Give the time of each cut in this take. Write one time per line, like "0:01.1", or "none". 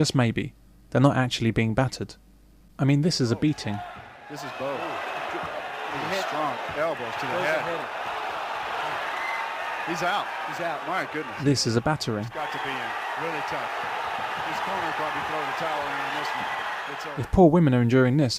0:03.6